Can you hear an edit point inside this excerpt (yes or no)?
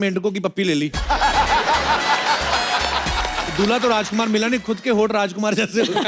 no